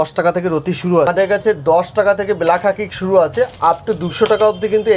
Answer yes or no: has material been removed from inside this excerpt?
yes